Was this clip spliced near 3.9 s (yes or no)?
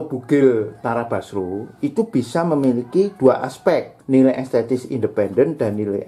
yes